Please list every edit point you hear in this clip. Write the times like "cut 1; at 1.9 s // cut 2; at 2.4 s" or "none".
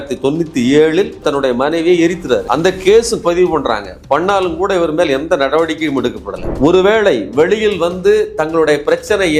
cut 1; at 6.5 s